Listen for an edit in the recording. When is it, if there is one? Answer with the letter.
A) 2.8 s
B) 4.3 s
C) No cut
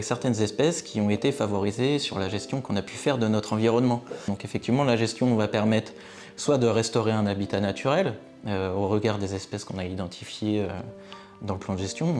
B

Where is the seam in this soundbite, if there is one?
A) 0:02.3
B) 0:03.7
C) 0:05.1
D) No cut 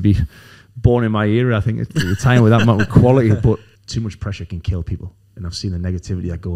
B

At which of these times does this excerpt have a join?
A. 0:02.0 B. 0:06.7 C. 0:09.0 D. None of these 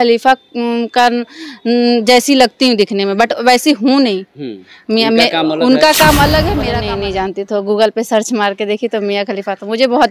B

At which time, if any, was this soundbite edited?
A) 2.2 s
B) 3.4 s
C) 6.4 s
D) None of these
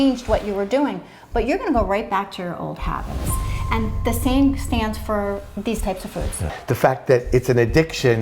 C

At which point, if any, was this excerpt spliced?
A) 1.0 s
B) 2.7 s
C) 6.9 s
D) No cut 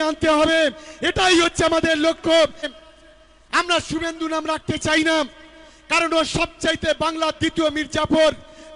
B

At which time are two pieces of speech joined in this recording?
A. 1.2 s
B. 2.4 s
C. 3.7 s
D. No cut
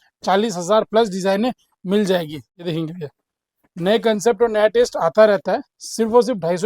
B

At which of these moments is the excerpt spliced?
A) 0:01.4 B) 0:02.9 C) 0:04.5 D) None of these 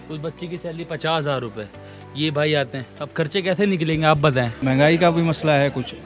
C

